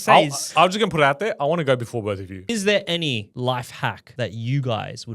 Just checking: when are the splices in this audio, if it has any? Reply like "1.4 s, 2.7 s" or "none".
2.5 s, 3.3 s, 4.0 s